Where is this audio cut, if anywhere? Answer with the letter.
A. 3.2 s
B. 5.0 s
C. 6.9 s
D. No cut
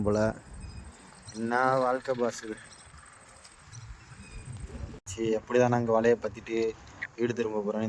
B